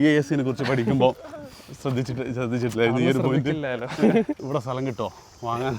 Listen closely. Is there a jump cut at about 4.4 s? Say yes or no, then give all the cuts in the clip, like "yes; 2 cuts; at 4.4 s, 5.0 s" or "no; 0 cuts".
yes; 1 cut; at 4.4 s